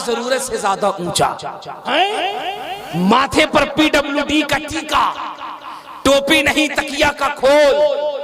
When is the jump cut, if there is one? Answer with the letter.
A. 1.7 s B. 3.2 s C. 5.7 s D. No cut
A